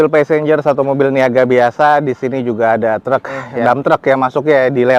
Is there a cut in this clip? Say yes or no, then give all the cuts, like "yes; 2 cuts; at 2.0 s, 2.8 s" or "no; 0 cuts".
no; 0 cuts